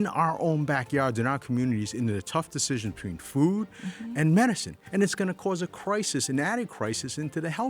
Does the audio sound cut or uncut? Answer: cut